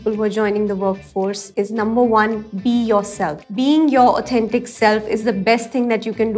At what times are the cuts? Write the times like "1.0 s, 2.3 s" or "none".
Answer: 1.4 s, 3.4 s